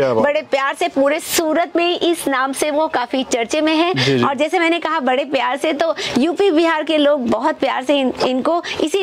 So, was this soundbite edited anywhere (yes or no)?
no